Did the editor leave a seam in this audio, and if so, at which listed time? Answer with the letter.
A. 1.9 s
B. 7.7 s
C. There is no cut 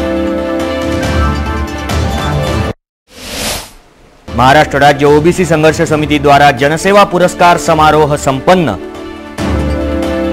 A